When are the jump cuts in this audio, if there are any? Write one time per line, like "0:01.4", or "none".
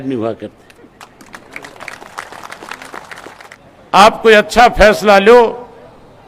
0:03.5